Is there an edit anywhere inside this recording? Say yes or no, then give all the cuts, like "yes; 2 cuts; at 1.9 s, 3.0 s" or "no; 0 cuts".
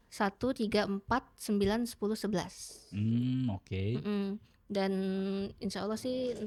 no; 0 cuts